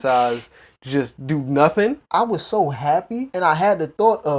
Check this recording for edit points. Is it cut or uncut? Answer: cut